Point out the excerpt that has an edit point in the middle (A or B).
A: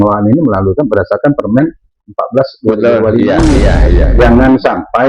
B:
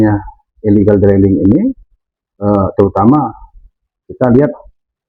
A